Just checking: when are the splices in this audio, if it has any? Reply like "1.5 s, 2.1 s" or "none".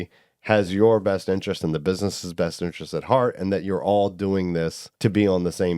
4.8 s